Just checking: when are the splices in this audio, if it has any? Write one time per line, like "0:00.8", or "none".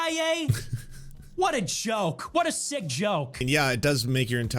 0:03.4